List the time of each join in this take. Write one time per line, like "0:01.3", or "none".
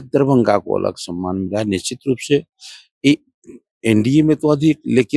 none